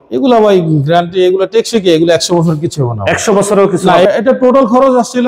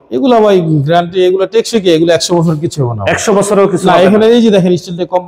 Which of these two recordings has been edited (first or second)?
first